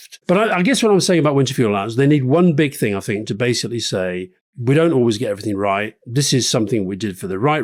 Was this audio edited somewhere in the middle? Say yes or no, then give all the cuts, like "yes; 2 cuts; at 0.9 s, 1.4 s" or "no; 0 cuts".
no; 0 cuts